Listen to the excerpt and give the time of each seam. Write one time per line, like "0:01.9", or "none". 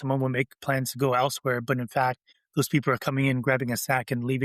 none